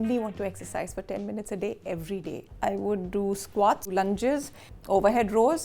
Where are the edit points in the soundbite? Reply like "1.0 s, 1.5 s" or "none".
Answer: 2.4 s, 4.7 s